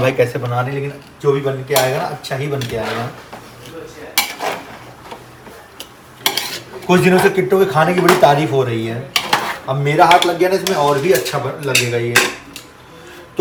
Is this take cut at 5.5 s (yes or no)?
no